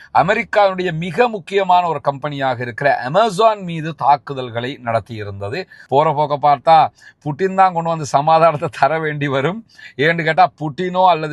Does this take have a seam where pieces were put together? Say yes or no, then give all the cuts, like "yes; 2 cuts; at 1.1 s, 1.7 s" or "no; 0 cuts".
yes; 1 cut; at 5.7 s